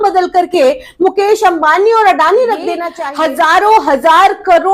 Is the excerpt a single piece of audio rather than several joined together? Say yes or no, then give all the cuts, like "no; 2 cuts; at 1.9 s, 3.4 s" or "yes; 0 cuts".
no; 1 cut; at 2.9 s